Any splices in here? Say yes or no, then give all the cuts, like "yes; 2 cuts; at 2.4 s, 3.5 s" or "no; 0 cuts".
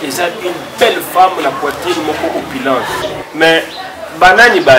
yes; 1 cut; at 3.1 s